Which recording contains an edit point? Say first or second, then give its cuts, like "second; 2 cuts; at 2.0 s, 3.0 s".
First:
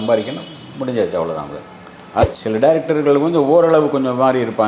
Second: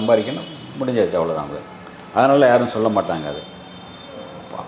first; 1 cut; at 2.2 s